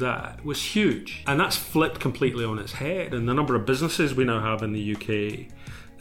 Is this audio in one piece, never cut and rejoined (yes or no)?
no